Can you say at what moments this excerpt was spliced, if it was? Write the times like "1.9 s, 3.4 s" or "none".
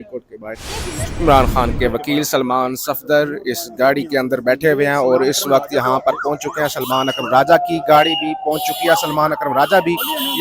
1.2 s